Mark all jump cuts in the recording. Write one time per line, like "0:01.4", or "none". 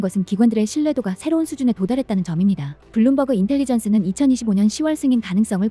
0:02.7